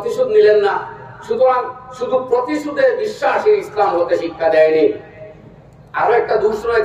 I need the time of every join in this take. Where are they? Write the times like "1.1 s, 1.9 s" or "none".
none